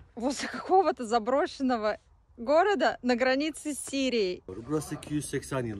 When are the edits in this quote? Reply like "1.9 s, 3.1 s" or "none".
4.5 s